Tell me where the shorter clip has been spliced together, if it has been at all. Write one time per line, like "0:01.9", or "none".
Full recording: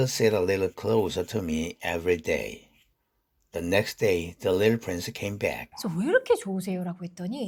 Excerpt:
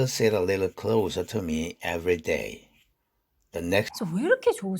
0:03.9